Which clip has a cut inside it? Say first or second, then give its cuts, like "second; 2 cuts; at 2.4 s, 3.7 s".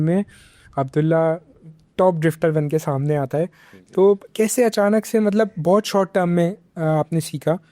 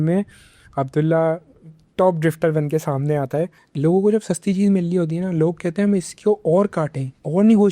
second; 1 cut; at 3.6 s